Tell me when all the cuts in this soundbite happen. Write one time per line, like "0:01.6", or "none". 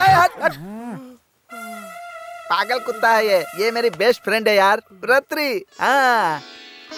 none